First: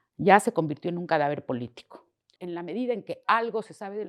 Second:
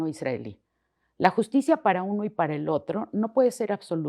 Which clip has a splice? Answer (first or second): first